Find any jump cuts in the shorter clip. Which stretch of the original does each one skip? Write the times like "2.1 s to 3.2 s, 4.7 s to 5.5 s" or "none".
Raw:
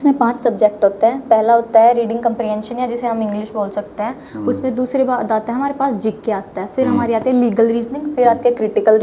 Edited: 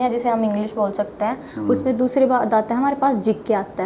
none